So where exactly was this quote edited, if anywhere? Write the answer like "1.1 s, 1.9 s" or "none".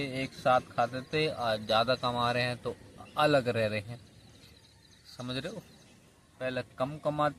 none